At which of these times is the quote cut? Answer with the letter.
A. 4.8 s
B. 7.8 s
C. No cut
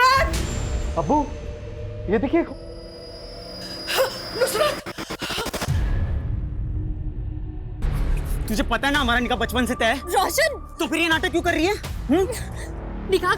B